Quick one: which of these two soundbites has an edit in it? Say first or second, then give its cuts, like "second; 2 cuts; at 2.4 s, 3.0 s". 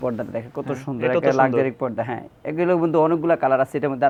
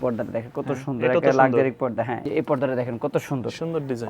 second; 1 cut; at 2.2 s